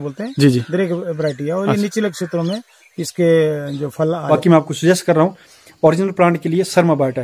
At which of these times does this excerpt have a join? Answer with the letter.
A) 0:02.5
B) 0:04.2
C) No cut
B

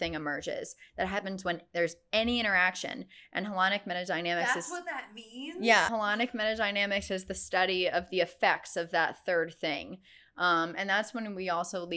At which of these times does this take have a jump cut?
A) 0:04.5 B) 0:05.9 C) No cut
B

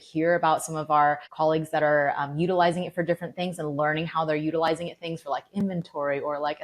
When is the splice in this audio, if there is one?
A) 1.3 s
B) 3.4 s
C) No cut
A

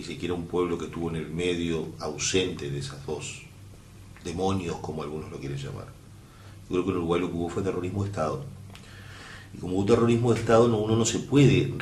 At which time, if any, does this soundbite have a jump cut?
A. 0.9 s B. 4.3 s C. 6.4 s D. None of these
A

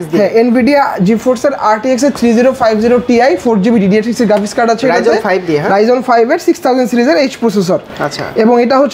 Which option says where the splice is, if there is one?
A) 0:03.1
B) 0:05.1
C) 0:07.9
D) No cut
D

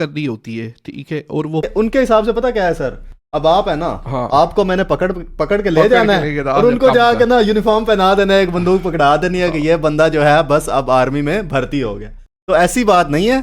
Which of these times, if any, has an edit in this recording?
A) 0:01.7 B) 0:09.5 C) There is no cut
A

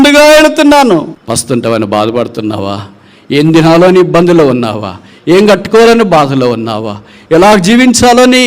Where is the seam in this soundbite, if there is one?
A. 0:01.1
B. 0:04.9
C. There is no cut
A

